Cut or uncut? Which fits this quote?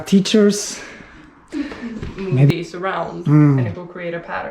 cut